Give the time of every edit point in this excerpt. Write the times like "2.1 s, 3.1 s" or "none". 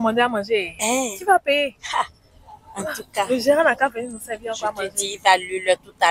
none

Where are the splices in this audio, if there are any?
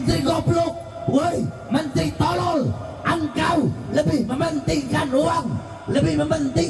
none

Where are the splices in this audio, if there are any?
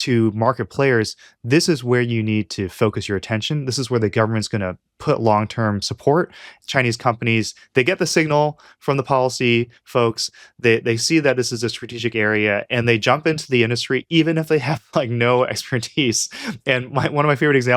6.5 s

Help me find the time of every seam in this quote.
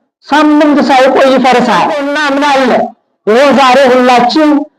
2.0 s

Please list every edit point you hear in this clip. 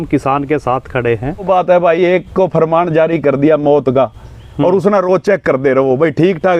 1.4 s

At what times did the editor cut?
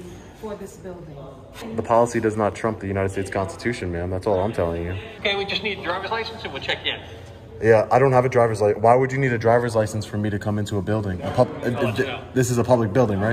1.7 s, 5.0 s

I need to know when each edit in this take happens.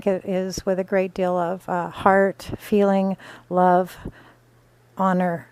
4.4 s

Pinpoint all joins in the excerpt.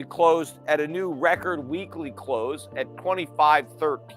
2.9 s

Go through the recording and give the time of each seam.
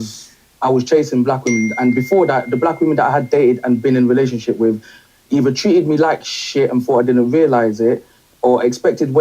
2.2 s, 7.5 s

